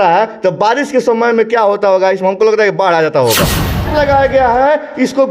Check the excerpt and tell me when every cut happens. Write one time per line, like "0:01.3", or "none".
0:03.9